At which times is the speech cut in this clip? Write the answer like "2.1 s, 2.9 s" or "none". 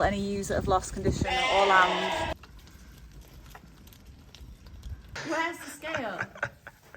2.3 s, 5.1 s